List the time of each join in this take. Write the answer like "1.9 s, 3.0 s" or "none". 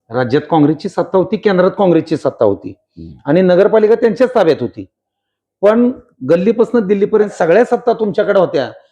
7.3 s